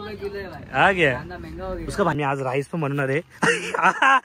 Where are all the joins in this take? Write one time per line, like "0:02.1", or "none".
0:02.1